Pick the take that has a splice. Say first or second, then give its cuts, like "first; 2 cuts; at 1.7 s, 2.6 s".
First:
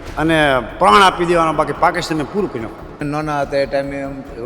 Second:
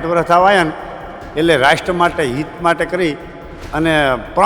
first; 1 cut; at 3.0 s